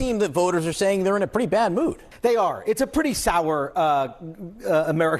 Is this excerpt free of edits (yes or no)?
yes